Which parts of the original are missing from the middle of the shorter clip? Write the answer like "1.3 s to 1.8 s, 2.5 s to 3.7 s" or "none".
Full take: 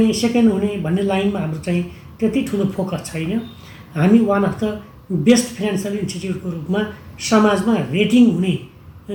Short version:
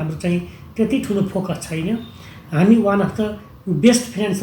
none